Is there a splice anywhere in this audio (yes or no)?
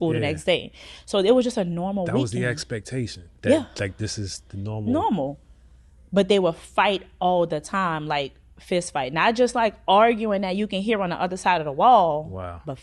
no